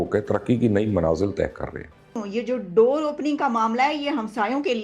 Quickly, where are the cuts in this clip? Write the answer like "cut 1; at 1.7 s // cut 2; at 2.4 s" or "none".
cut 1; at 2.2 s